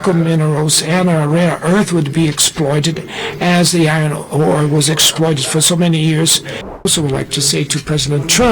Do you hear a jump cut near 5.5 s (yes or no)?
no